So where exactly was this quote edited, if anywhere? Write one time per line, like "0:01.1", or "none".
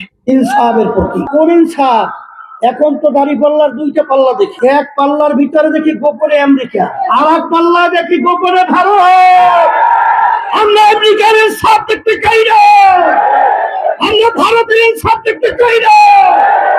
0:01.3
0:04.5
0:07.0
0:10.5